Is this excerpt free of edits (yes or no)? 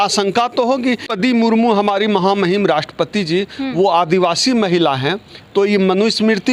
no